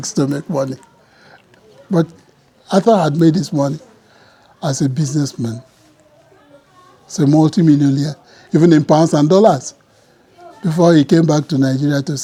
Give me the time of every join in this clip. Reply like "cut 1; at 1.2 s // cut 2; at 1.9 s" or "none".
none